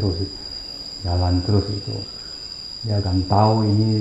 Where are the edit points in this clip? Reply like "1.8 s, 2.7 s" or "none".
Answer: none